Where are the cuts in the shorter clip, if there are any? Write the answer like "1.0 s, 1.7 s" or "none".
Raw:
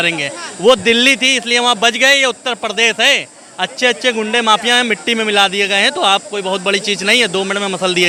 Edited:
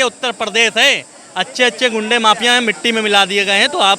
none

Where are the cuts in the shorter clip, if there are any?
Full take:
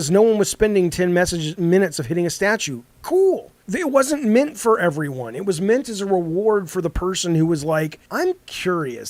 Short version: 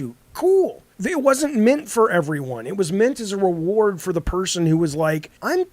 none

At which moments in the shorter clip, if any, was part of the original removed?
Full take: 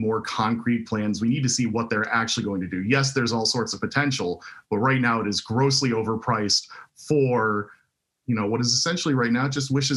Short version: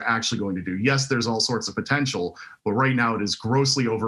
none

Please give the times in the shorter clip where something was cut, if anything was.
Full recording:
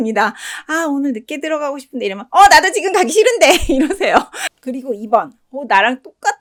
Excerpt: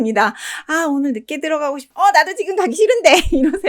1.9 s

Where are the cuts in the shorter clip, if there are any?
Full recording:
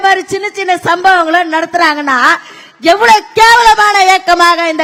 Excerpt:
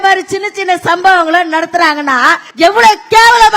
2.5 s

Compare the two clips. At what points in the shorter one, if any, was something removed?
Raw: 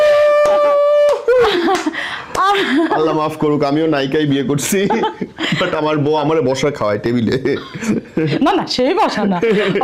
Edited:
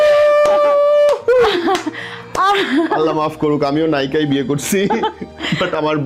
none

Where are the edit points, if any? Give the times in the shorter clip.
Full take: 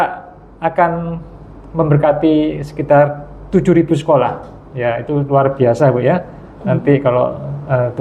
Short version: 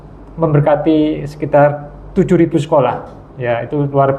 none

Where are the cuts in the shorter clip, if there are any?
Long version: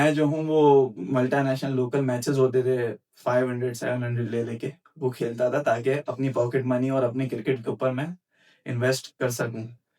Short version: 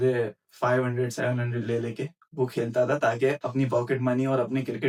none

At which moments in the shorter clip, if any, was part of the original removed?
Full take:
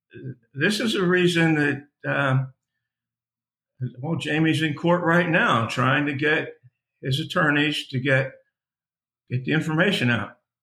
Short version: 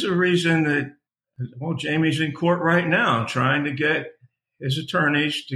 1.0 s

